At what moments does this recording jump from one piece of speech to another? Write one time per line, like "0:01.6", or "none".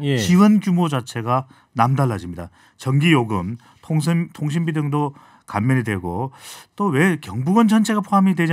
none

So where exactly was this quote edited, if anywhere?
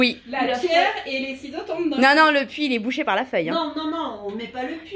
none

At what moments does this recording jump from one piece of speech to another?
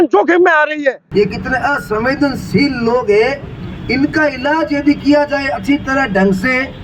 0:01.0

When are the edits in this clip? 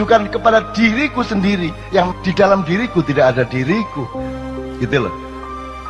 0:02.2

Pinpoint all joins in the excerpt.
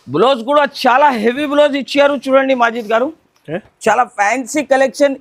none

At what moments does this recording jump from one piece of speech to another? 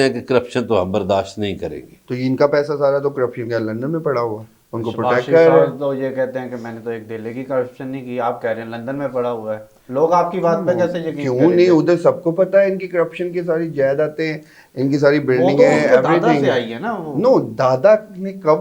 none

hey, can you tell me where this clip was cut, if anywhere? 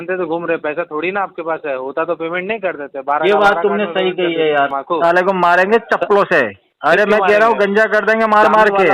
0:04.8
0:06.6

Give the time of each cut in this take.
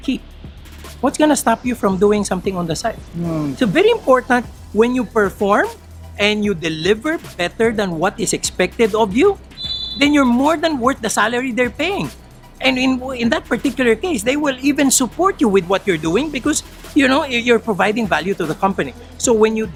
none

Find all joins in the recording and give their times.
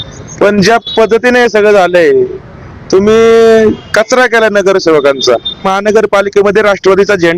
0:05.7

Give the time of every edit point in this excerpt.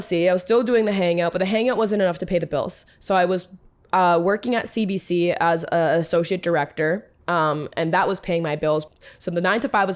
0:08.8

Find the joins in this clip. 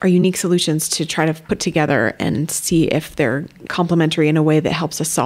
0:01.4

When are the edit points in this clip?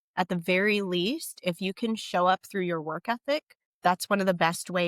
0:03.6

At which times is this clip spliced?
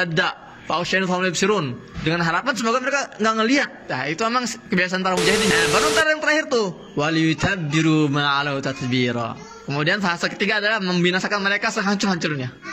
0:05.5

